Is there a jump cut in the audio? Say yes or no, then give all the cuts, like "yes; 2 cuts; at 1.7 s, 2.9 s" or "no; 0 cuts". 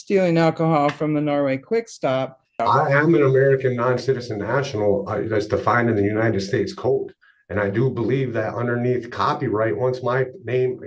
yes; 1 cut; at 2.6 s